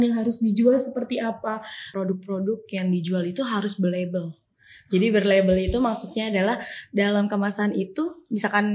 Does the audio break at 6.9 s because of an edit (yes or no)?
no